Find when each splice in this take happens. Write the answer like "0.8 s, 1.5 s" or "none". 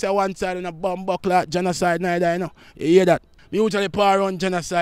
3.3 s

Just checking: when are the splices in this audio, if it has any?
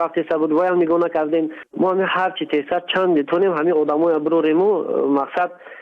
1.6 s

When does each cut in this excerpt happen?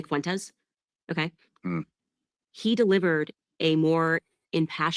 none

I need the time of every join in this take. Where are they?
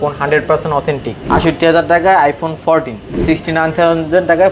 1.1 s, 3.1 s

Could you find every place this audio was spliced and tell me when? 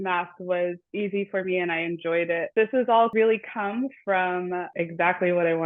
0.8 s, 2.5 s, 3.1 s, 4.7 s

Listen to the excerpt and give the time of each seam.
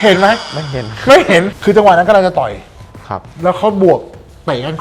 1.5 s

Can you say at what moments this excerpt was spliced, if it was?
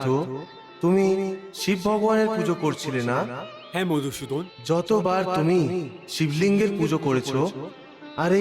4.5 s

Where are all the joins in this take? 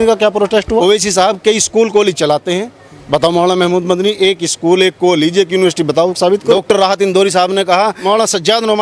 none

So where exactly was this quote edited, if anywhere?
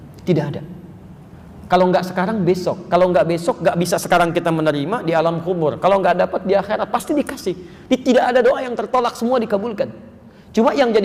none

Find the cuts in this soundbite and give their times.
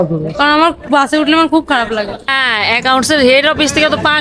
2.3 s

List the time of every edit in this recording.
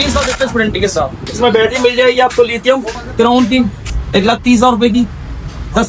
1.2 s

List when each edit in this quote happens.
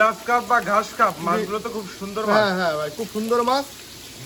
none

